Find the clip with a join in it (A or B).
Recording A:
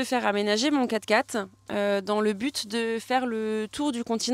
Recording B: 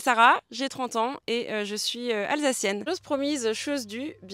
B